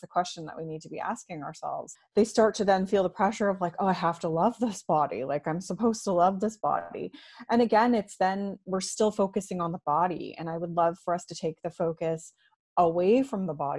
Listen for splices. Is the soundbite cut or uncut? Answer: cut